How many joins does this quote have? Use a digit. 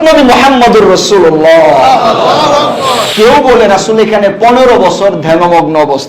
1